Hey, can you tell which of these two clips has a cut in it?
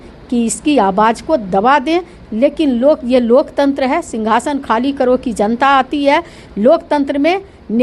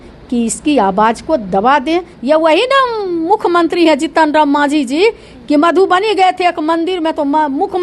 second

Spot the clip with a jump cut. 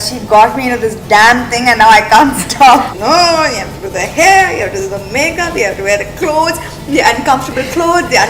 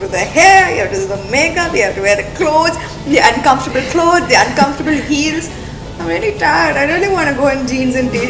first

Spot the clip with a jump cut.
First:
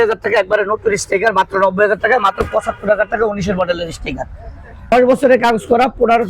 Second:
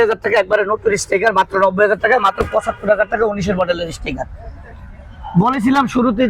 first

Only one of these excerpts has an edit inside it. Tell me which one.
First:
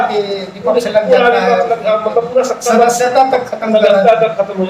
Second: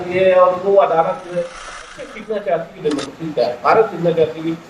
second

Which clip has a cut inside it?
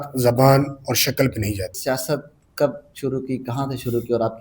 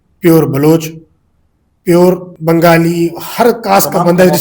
first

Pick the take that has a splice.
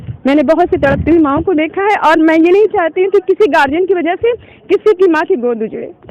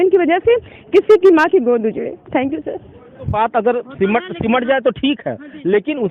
second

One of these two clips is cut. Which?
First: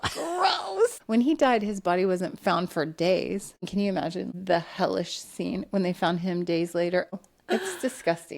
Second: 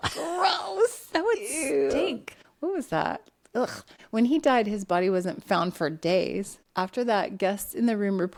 first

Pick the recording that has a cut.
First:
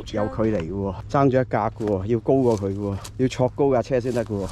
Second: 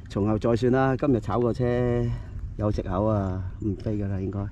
first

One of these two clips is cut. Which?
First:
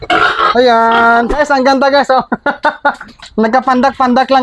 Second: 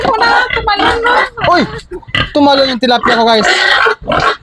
first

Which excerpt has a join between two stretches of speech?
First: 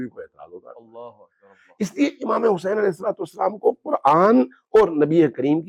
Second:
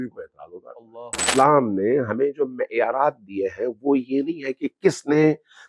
second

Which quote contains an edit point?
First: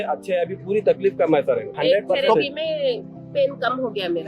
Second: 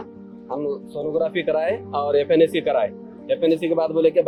first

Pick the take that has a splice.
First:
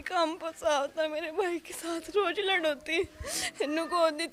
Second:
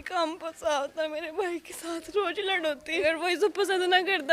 second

